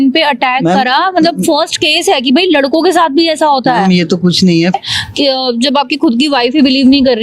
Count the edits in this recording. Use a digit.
1